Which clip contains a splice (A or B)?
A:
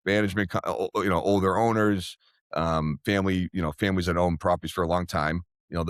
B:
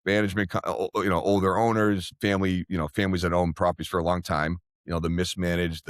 B